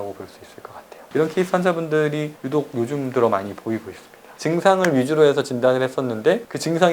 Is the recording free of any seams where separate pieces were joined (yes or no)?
no